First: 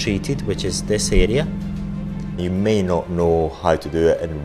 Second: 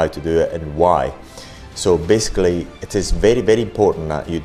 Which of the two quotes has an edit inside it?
first; 1 cut; at 2.4 s

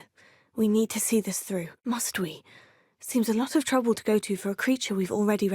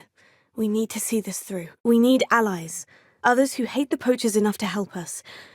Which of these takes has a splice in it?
first; 1 cut; at 1.7 s

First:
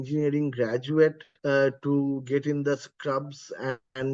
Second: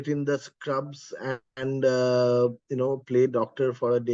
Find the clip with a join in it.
first; 1 cut; at 1.3 s

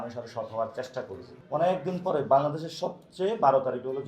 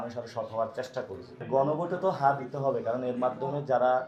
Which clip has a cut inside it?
first; 1 cut; at 1.3 s

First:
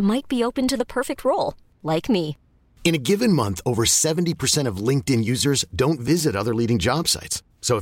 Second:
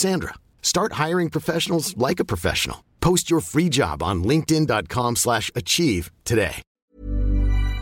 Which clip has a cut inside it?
second; 1 cut; at 6.8 s

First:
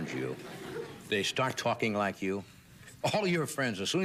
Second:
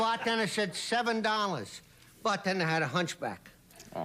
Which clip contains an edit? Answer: first; 1 cut; at 3.1 s

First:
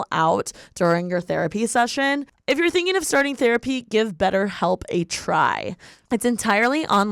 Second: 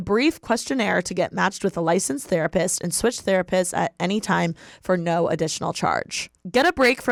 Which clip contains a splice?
first; 1 cut; at 2.3 s

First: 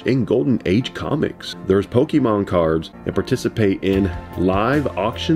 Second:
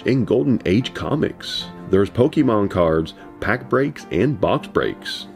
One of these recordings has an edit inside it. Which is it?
first; 2 cuts; at 1.5 s, 3.0 s

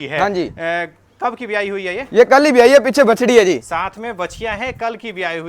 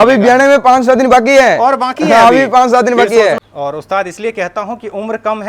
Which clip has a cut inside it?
second; 1 cut; at 3.4 s

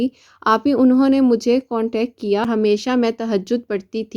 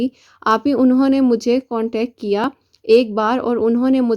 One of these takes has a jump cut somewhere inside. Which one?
first; 1 cut; at 2.4 s

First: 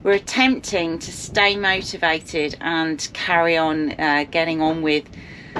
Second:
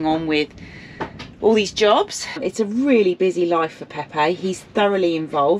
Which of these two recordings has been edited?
second; 1 cut; at 2.3 s

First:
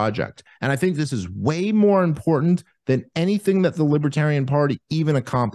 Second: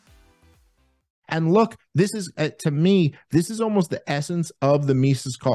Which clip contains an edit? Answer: second; 1 cut; at 1.1 s

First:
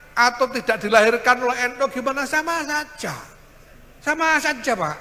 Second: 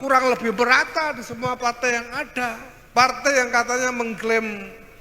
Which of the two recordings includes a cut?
second; 1 cut; at 2.7 s

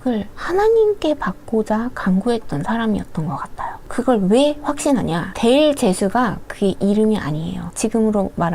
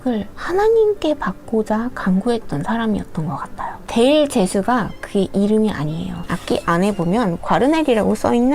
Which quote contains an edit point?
second; 2 cuts; at 3.8 s, 6.2 s

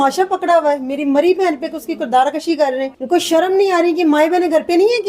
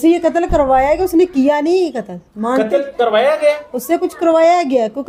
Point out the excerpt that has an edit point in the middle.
first; 1 cut; at 2.9 s

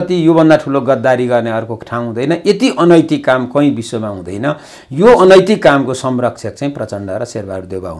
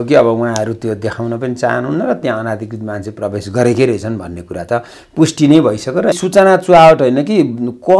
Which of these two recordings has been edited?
second; 1 cut; at 6.2 s

